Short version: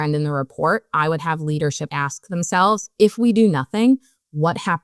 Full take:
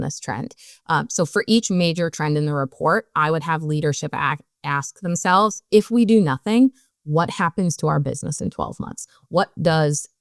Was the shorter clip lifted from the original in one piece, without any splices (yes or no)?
no